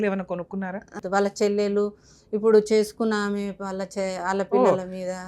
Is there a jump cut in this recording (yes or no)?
yes